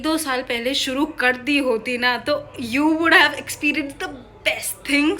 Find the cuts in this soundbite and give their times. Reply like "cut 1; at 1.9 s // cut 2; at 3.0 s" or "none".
none